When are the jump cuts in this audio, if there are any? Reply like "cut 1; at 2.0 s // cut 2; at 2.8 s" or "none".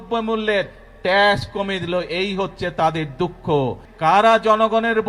cut 1; at 3.8 s